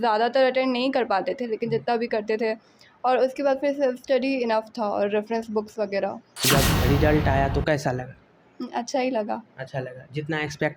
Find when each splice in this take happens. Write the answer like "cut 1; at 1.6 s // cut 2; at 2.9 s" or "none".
cut 1; at 6.4 s